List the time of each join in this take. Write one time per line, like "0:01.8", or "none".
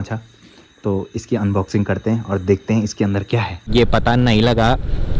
0:03.7